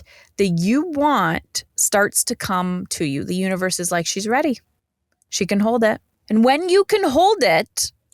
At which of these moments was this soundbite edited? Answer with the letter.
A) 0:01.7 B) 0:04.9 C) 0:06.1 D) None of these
C